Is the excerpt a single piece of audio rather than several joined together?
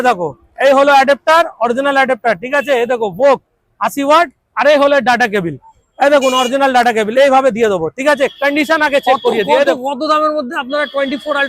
no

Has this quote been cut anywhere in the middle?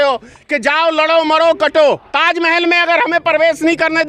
yes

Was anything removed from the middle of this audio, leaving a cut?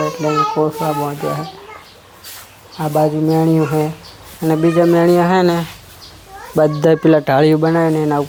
no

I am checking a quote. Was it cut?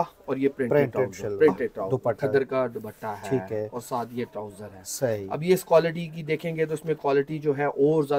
yes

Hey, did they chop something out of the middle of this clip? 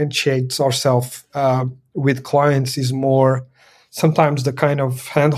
no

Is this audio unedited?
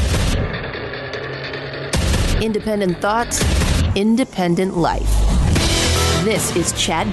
yes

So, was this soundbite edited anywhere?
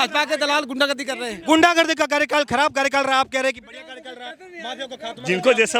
no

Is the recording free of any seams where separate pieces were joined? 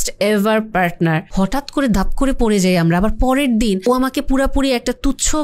no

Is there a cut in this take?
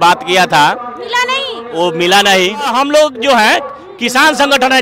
yes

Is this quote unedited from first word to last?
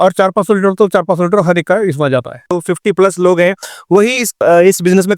no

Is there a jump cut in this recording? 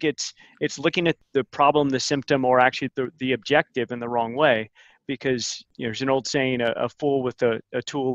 yes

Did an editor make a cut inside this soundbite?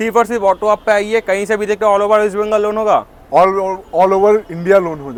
no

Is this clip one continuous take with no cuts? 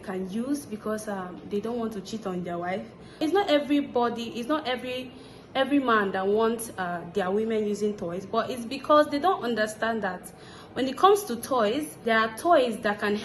no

